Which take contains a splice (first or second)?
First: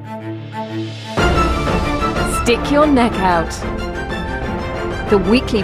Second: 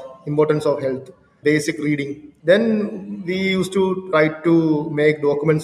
second